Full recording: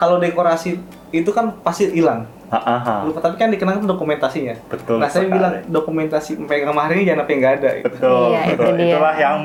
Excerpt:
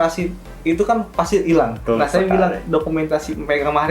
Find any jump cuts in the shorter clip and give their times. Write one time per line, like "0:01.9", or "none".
0:01.8